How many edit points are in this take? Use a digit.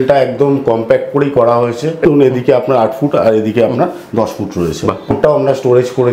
2